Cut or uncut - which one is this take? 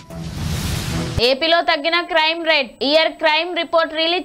uncut